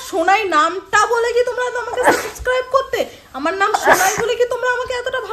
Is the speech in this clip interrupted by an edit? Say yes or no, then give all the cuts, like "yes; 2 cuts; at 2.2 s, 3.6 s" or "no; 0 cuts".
no; 0 cuts